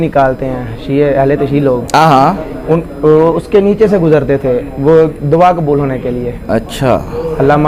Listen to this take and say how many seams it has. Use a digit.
0